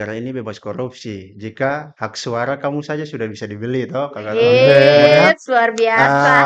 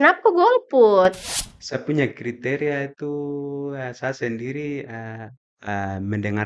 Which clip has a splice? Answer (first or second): second